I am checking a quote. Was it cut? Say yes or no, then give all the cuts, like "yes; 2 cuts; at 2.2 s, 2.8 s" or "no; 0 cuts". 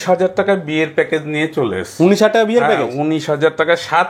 no; 0 cuts